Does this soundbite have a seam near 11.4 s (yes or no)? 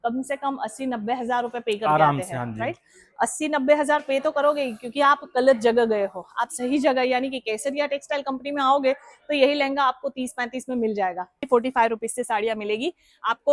yes